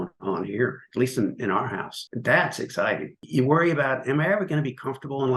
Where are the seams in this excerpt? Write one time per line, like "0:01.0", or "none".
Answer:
0:02.0
0:03.2